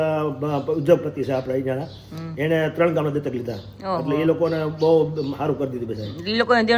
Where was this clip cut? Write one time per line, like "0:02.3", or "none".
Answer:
none